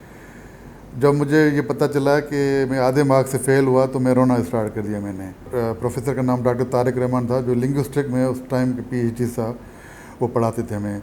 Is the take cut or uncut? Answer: cut